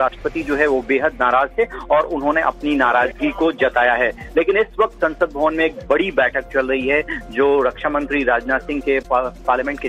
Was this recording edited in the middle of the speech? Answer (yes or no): yes